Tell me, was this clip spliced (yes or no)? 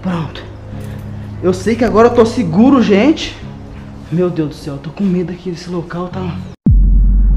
yes